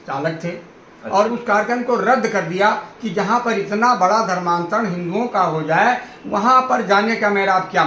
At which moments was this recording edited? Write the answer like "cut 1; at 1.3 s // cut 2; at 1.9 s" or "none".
cut 1; at 1.3 s